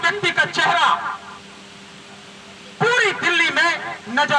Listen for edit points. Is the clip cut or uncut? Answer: uncut